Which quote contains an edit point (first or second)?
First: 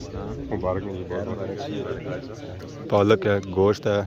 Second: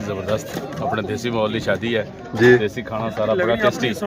first